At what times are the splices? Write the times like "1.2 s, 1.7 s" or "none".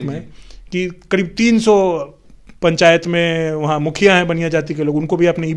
none